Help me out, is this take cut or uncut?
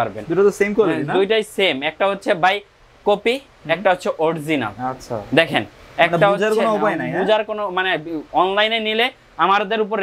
uncut